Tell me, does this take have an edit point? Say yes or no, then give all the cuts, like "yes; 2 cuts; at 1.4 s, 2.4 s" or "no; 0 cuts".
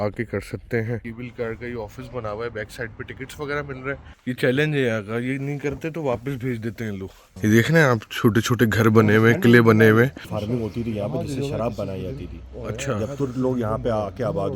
yes; 4 cuts; at 1.0 s, 4.1 s, 7.3 s, 10.2 s